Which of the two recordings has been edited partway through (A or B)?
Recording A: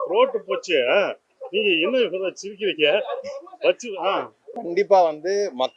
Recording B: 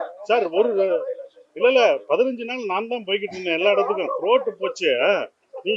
A